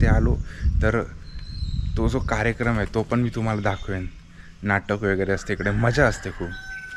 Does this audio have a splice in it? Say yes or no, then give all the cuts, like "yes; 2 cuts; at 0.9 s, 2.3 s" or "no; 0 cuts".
no; 0 cuts